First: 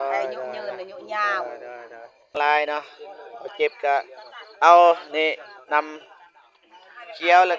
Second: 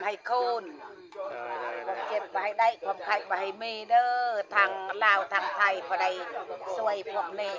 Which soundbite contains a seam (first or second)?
first